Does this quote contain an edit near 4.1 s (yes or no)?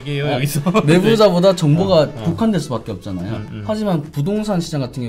no